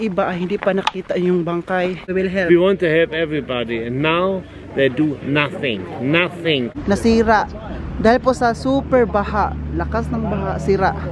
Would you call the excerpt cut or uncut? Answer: cut